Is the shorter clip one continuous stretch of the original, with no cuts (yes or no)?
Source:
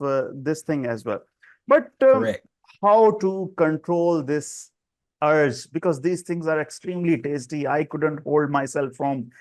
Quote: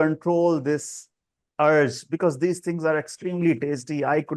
yes